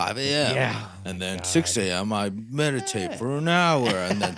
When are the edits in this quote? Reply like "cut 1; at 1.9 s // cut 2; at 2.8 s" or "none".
none